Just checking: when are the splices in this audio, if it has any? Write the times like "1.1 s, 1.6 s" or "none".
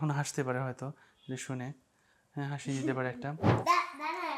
3.5 s

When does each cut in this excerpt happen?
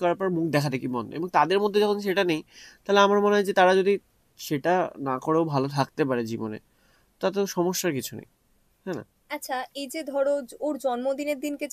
none

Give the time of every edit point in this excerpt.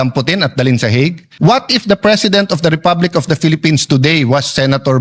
1.2 s

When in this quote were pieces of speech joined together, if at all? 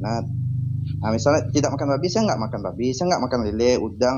none

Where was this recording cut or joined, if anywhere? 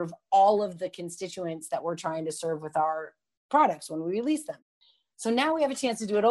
4.6 s

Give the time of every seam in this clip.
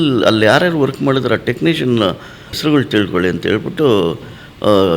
2.6 s

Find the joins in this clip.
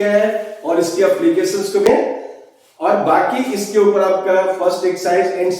1.9 s

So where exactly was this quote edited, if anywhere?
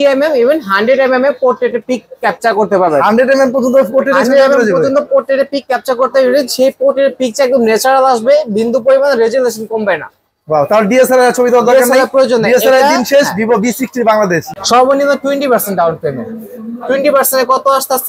14.5 s

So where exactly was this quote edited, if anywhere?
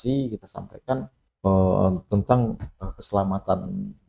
1.2 s

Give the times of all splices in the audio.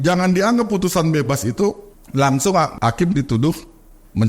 1.9 s, 2.7 s

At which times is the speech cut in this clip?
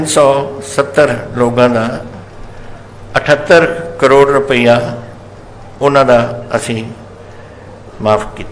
none

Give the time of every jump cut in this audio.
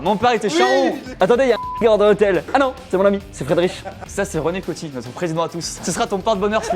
1.0 s, 4.0 s

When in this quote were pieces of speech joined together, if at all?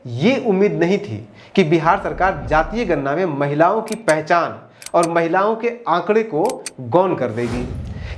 none

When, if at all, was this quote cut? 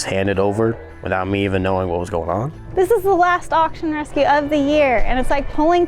0.9 s, 2.6 s

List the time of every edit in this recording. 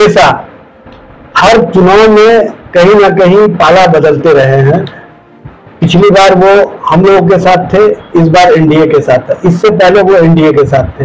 none

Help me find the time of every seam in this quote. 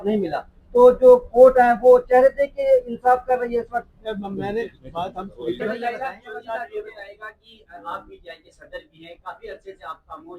5.6 s

